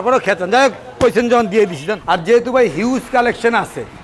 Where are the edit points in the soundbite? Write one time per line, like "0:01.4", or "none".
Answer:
0:02.2